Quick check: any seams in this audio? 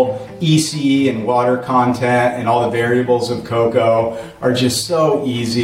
no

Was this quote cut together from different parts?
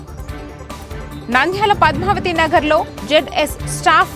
yes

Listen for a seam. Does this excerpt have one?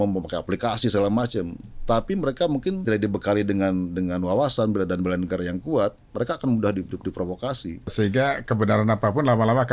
yes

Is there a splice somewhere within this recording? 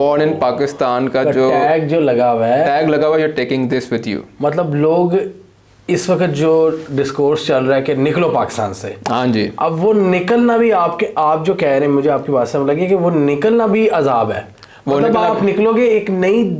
no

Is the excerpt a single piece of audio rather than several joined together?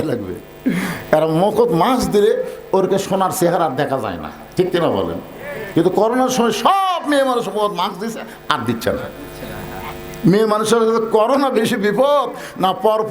yes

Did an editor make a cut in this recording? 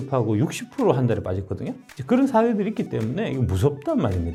no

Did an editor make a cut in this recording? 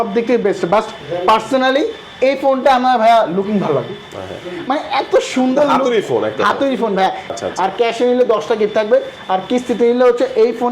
yes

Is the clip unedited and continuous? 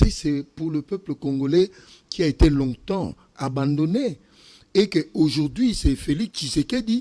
yes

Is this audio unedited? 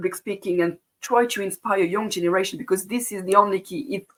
yes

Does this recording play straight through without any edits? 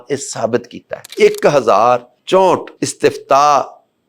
no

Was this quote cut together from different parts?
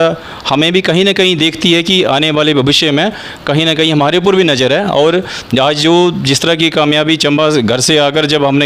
no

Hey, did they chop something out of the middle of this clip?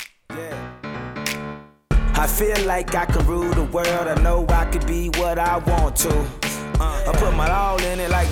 no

